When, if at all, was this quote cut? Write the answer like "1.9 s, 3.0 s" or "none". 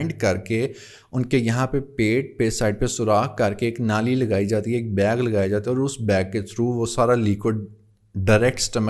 none